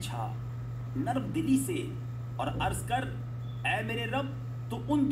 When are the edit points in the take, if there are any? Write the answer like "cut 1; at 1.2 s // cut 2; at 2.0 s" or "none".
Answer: none